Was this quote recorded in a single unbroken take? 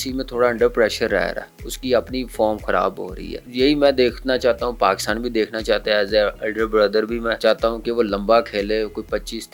yes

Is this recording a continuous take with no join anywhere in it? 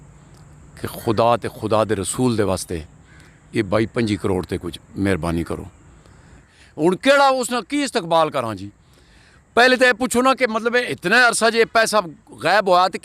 no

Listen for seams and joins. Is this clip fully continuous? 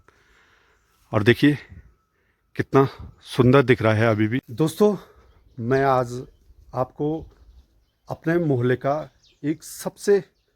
no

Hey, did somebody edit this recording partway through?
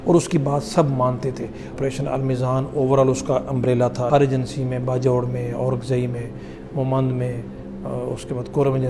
yes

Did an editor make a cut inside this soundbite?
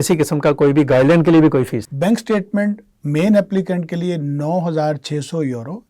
yes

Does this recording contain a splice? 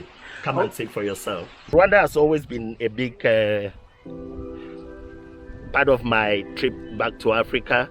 yes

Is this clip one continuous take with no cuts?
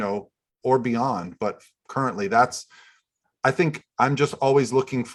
yes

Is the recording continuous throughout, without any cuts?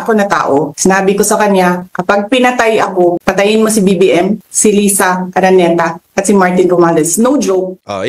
yes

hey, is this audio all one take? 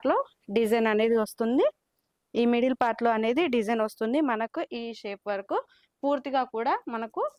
yes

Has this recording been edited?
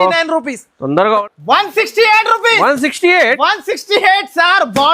yes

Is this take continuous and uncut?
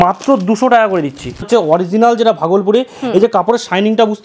no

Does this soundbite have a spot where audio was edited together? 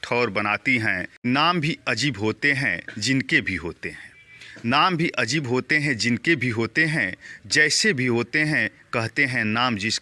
yes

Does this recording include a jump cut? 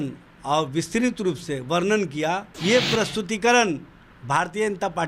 yes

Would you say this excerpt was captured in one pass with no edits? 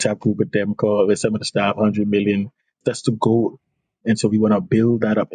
no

